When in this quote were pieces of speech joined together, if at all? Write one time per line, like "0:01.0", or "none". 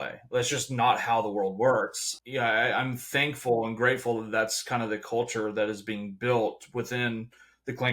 0:02.1